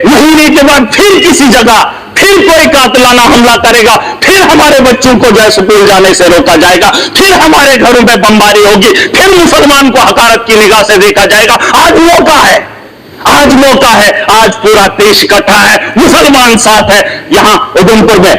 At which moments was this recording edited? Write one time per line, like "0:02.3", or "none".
none

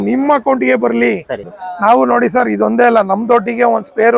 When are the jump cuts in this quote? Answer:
0:01.5

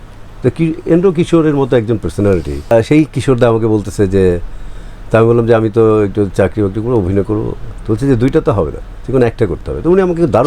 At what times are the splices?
0:02.7

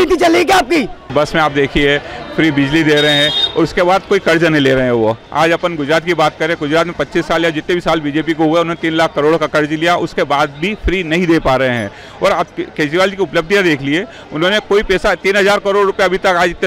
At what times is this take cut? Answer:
none

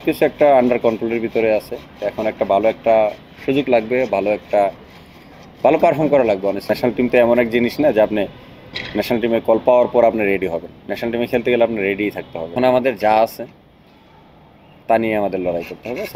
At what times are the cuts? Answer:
0:06.6
0:12.5

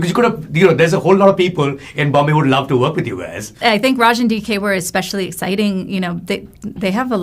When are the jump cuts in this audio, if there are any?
0:03.6

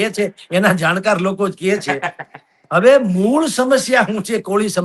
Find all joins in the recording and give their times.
none

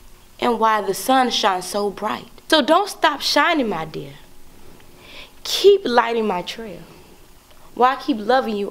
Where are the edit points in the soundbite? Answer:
0:02.3

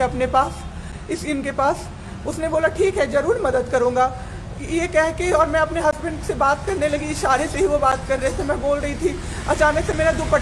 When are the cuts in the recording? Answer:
none

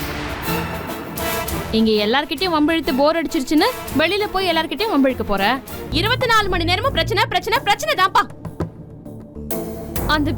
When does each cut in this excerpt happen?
0:05.8

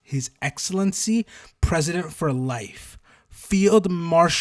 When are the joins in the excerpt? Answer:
none

